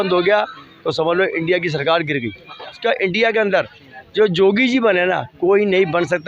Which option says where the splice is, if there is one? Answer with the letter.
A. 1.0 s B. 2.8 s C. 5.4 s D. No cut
B